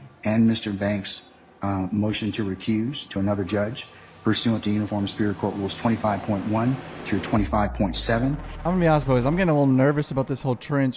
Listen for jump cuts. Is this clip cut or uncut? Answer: cut